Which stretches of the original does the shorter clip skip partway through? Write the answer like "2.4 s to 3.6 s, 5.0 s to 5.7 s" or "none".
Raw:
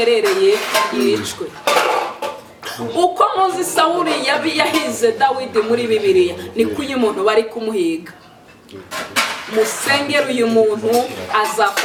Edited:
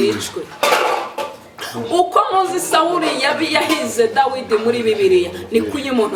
none